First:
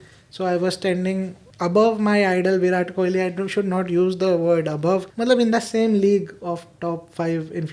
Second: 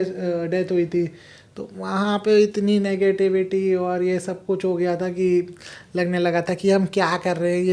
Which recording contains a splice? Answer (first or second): first